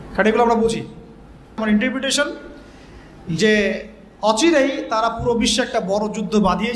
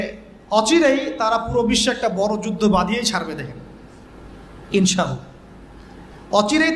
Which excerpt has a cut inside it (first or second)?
first